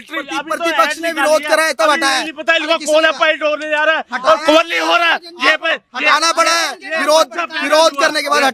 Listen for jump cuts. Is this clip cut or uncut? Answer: uncut